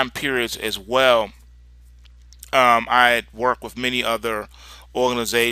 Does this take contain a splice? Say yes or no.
yes